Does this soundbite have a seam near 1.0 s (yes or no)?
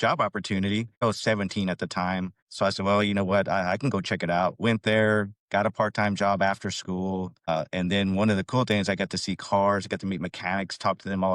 yes